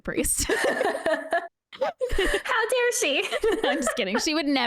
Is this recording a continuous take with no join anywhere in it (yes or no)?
no